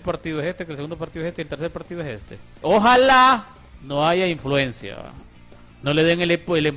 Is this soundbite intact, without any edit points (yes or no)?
no